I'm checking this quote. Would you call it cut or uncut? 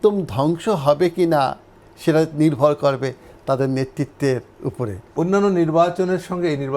cut